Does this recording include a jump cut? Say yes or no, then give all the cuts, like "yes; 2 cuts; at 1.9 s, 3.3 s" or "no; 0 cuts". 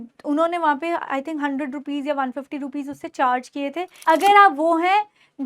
yes; 1 cut; at 3.9 s